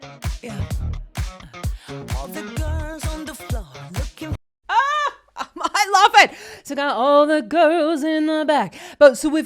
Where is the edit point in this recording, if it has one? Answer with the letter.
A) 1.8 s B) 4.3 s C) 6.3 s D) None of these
D